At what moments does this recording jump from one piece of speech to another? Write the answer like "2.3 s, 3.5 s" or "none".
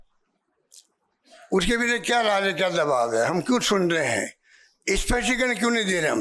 none